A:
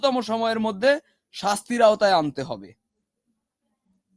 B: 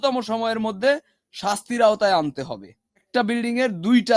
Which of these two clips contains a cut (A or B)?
B